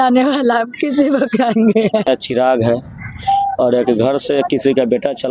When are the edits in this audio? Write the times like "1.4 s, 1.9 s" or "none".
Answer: 2.0 s